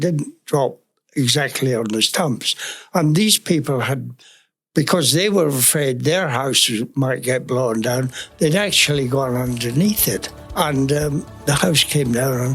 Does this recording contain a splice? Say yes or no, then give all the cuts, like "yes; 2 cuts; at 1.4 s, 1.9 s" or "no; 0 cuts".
yes; 2 cuts; at 10.4 s, 11.3 s